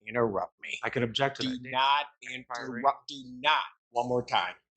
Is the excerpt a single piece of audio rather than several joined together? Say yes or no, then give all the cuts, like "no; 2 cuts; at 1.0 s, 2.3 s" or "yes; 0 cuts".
no; 1 cut; at 3.8 s